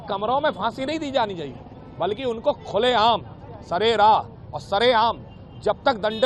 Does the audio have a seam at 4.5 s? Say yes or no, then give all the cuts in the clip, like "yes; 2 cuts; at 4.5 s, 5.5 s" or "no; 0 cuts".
no; 0 cuts